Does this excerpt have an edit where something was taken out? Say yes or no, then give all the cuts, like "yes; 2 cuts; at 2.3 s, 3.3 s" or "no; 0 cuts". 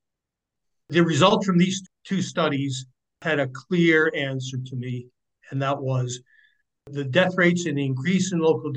yes; 1 cut; at 1.9 s